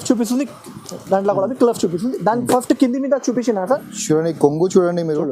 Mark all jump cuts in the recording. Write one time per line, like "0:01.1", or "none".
0:03.8